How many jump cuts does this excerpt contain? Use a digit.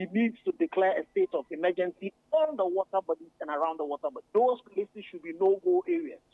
2